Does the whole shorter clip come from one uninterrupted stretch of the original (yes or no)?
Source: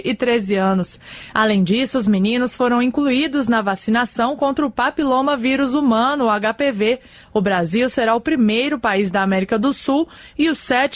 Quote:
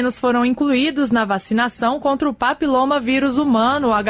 yes